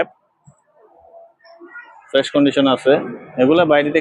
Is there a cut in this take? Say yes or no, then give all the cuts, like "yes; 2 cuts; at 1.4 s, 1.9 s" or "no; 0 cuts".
no; 0 cuts